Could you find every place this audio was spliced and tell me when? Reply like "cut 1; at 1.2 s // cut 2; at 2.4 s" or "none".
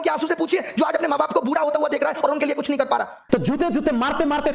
cut 1; at 3.2 s